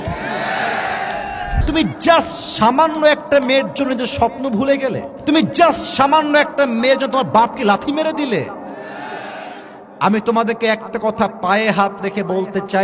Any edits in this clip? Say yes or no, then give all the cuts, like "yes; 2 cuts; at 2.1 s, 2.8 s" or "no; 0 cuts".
yes; 2 cuts; at 1.5 s, 5.1 s